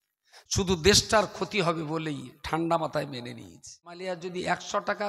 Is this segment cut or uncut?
cut